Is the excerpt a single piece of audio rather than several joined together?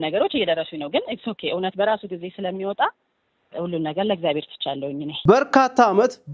no; 1 cut; at 5.2 s

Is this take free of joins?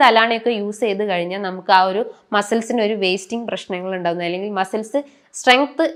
yes; 0 cuts

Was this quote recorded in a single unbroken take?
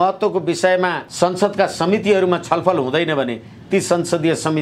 no; 1 cut; at 1.0 s

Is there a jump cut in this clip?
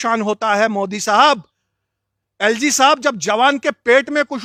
no; 0 cuts

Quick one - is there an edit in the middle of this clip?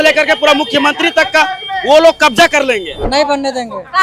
yes; 1 cut; at 2.9 s

